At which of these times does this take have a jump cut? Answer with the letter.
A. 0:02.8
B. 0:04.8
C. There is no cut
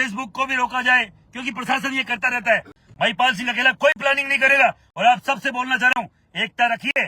A